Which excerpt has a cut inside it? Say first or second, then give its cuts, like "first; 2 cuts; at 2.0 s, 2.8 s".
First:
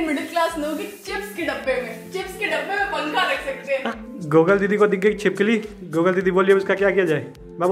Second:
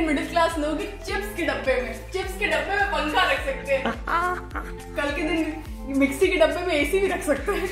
first; 1 cut; at 4.0 s